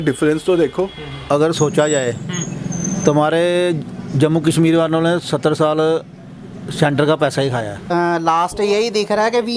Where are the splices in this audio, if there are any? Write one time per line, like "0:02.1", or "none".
0:01.1
0:07.8